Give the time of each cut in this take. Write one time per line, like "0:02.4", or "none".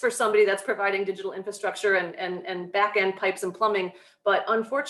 none